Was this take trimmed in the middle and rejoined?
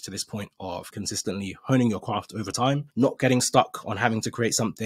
yes; 1 cut; at 0.9 s

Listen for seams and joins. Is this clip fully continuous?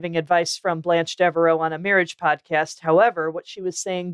yes; 0 cuts

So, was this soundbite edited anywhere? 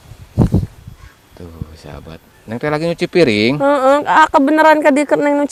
no; 0 cuts

